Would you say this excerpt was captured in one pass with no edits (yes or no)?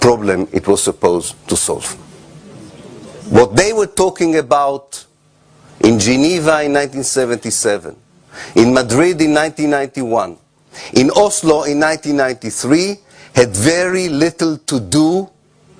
yes